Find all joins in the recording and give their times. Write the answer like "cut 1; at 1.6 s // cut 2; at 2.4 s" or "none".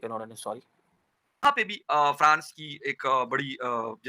cut 1; at 1.4 s